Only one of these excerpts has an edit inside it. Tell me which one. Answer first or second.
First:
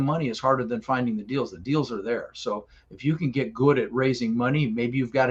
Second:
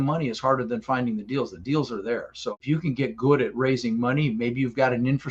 second